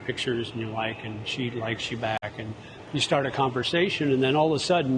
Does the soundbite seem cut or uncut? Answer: uncut